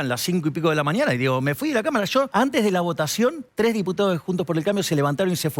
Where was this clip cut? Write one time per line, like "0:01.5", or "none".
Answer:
0:02.3
0:03.4